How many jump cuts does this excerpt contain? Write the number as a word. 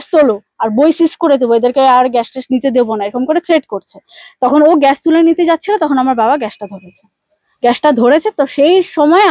zero